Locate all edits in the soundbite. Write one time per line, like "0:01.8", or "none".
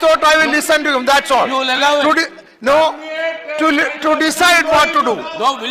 0:01.7